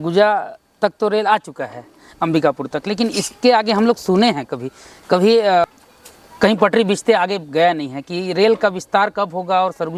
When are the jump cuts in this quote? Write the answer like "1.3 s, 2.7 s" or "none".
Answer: 5.7 s